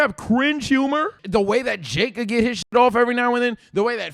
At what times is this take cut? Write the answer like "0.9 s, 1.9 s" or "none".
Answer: 1.2 s